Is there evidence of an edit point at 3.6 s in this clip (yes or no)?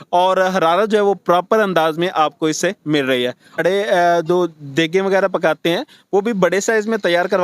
yes